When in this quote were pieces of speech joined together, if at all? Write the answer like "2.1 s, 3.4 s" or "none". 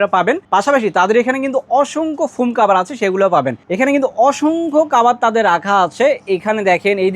3.6 s